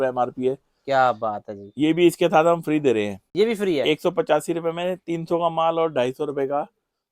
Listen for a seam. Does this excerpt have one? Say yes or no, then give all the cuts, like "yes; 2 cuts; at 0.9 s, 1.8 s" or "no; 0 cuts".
no; 0 cuts